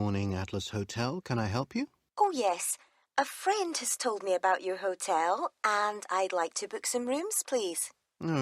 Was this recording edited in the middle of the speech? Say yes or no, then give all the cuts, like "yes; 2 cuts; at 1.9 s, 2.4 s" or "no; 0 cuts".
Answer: yes; 1 cut; at 2.0 s